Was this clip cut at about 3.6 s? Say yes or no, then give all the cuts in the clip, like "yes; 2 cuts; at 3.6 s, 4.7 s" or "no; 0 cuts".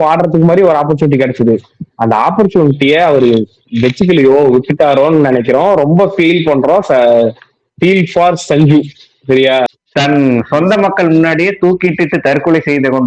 no; 1 cut; at 9.7 s